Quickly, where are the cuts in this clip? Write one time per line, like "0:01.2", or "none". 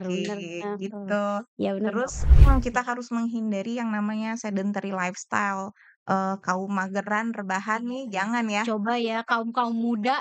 0:02.3